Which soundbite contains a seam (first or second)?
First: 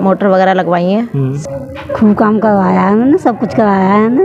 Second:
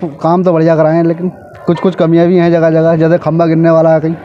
first